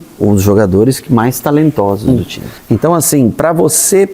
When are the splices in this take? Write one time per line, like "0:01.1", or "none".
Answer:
0:02.1